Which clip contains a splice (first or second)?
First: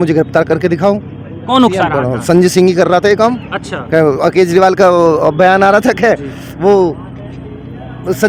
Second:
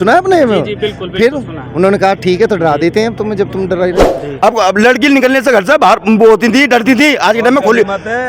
second